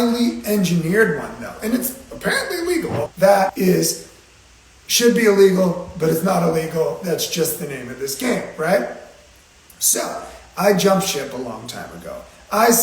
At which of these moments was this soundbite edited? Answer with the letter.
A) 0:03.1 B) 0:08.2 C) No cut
A